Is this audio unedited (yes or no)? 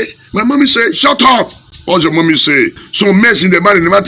no